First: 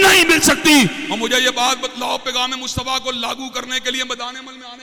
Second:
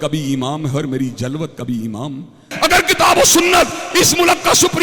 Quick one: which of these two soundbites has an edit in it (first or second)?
second